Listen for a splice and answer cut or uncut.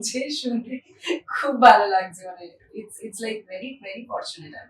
uncut